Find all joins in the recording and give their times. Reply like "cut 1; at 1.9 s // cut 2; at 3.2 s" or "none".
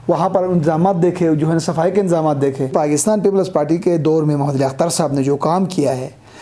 cut 1; at 2.7 s